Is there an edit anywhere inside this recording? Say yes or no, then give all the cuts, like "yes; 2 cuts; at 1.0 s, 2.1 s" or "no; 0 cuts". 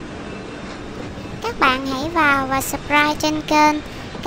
yes; 1 cut; at 1.4 s